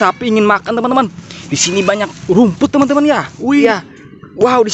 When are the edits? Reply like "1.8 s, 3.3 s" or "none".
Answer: 3.6 s